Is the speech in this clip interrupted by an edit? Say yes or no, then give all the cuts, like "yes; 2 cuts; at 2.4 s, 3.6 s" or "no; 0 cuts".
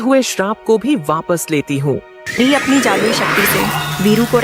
no; 0 cuts